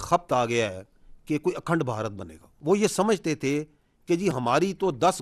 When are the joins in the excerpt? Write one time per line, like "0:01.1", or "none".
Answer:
0:02.5